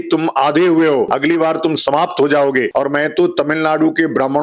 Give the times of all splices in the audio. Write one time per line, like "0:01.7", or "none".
0:01.1
0:02.7

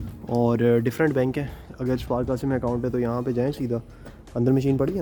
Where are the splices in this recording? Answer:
none

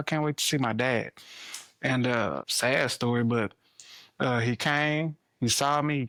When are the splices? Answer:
none

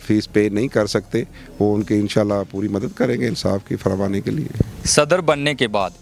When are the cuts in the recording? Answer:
none

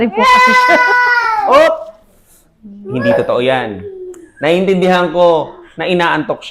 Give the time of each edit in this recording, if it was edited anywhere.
none

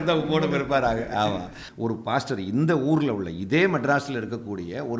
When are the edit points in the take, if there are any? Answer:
0:01.6

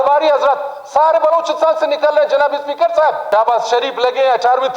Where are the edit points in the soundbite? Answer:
0:03.2

